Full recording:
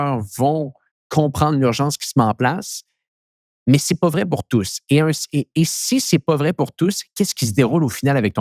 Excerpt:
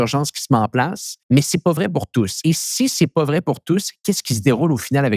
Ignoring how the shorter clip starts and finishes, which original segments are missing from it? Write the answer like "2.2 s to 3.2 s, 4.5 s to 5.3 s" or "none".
2.7 s to 3.4 s, 4.7 s to 5.5 s